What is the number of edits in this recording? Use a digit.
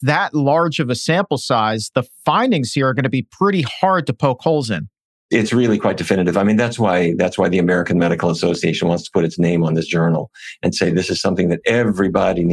1